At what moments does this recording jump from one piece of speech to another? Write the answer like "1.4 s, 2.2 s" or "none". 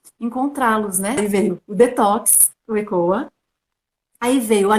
1.2 s